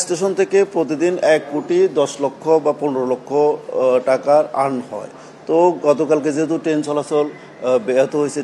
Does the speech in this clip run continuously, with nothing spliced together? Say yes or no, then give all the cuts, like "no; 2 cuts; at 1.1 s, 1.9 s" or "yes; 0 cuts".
yes; 0 cuts